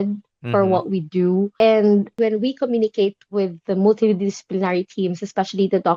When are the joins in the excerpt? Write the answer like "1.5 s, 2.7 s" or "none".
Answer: 1.5 s